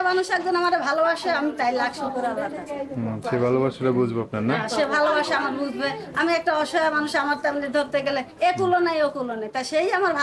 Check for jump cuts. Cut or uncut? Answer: uncut